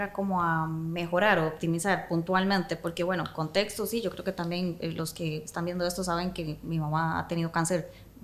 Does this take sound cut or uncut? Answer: uncut